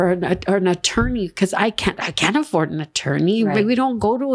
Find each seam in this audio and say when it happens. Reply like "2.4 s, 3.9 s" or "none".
none